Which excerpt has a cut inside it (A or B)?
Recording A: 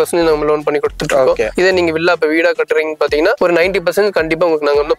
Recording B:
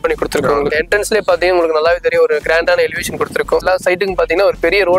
B